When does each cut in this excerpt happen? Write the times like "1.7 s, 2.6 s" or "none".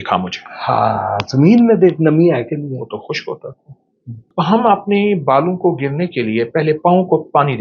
4.3 s